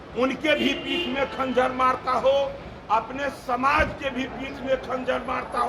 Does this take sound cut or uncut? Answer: uncut